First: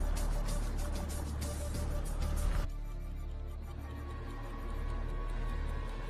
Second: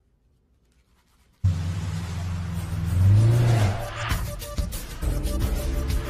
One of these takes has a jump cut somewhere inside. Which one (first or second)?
first